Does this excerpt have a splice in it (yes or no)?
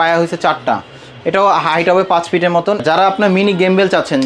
yes